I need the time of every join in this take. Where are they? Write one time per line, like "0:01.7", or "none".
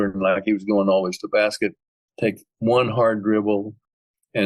none